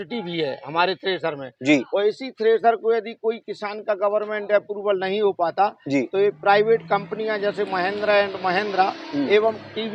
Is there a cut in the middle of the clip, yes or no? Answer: no